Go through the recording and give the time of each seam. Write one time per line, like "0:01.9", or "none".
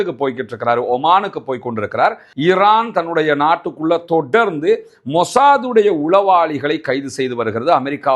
0:02.3